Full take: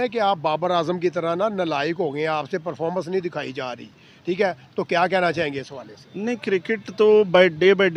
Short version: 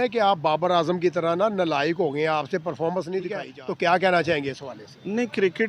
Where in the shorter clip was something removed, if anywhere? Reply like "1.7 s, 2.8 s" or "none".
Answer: 3.5 s